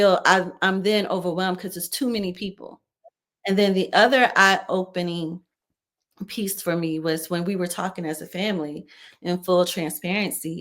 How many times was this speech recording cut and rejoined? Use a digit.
1